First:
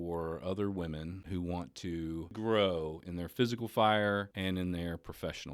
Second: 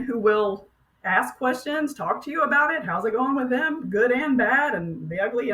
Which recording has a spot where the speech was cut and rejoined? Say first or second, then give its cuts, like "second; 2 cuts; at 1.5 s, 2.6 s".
first; 3 cuts; at 1.2 s, 2.3 s, 4.3 s